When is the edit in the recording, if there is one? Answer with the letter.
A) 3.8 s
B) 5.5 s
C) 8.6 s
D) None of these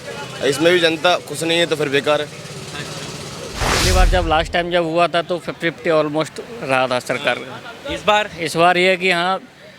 A